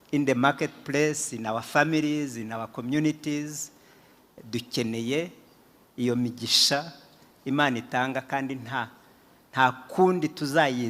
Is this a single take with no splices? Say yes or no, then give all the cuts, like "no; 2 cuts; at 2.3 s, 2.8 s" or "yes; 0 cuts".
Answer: yes; 0 cuts